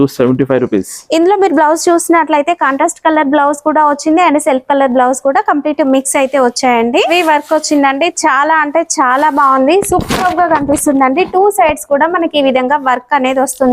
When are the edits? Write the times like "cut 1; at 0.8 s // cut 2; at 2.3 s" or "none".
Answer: cut 1; at 7.1 s